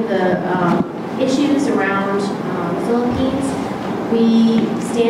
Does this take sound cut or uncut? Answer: uncut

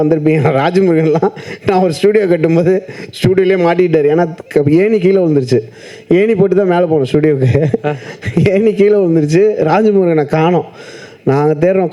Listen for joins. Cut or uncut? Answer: uncut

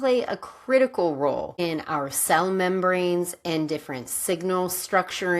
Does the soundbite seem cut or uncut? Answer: cut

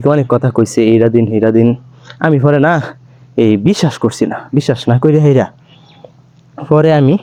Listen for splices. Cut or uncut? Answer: uncut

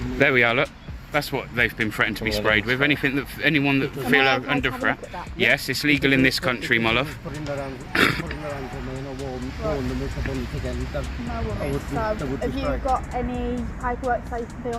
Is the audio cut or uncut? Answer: uncut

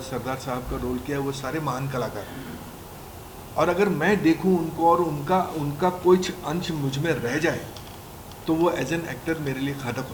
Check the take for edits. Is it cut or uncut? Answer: uncut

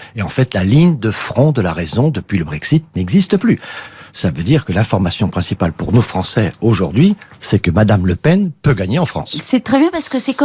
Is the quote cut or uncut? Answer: cut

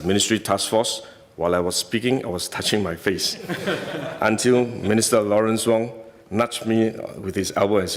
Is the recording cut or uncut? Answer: uncut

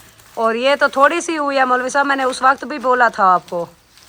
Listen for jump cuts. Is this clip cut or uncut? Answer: uncut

